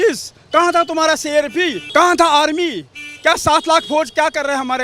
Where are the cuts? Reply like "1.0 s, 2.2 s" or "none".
1.8 s